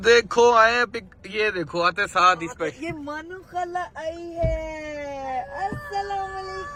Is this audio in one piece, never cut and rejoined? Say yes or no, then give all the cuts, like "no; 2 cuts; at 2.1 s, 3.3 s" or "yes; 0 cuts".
yes; 0 cuts